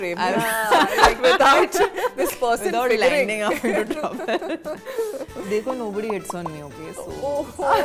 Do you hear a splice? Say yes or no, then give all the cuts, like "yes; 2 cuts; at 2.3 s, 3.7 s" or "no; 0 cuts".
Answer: no; 0 cuts